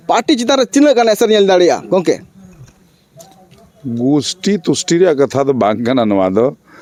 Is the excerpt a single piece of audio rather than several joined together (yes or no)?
yes